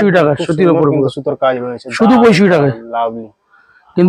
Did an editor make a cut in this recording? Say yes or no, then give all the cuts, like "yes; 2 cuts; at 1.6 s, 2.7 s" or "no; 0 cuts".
no; 0 cuts